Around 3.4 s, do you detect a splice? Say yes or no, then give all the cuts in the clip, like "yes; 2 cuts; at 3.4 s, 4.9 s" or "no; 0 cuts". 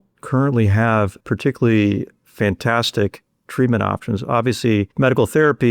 no; 3 cuts; at 1.2 s, 2.2 s, 4.9 s